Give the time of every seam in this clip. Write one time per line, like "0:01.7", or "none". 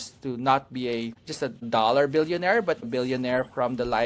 0:01.6
0:02.9